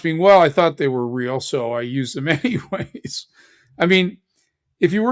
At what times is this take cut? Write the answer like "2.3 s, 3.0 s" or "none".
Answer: none